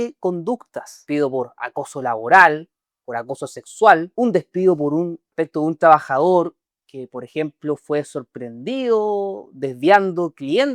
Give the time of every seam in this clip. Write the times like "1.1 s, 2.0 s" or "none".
1.0 s, 4.1 s, 5.2 s